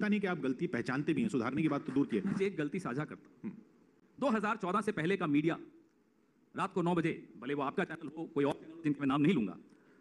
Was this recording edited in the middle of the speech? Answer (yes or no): yes